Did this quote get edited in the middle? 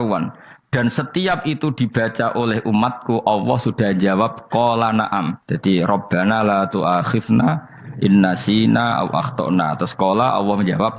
yes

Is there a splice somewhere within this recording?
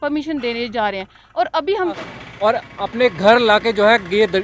yes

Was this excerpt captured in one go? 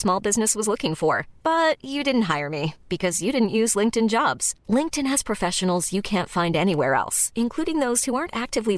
yes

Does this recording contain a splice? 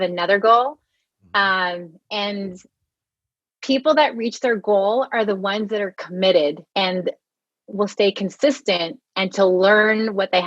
yes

